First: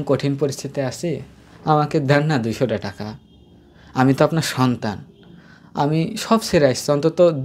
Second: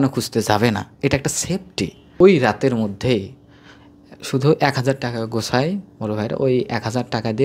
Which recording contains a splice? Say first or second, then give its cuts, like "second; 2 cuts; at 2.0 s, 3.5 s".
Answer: second; 1 cut; at 2.2 s